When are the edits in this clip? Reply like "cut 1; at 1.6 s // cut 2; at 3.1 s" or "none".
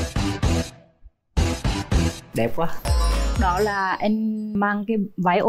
cut 1; at 2.8 s // cut 2; at 4.5 s